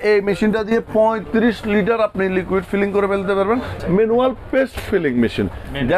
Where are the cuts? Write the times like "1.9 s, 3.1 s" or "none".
3.7 s